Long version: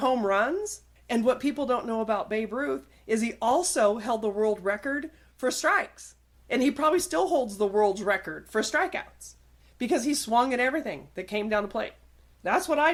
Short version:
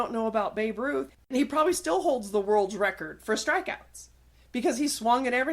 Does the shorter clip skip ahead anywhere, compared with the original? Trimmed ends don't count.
yes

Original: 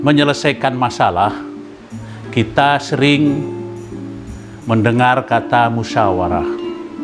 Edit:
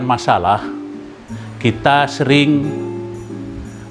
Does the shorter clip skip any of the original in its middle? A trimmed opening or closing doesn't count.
no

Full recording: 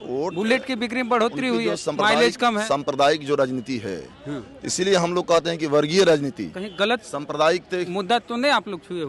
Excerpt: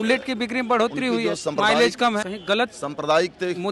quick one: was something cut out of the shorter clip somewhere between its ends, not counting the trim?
yes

